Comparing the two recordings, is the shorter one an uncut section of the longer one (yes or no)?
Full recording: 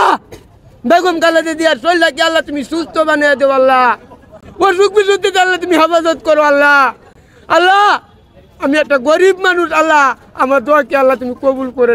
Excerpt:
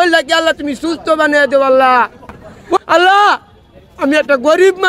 no